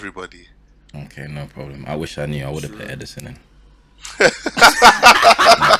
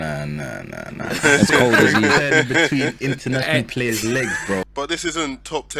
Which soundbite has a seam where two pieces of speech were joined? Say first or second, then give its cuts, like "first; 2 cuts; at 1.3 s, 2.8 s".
second; 1 cut; at 4.6 s